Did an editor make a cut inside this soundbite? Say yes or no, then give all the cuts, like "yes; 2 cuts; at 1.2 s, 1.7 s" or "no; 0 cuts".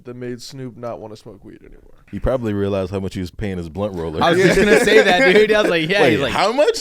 yes; 2 cuts; at 2.0 s, 3.3 s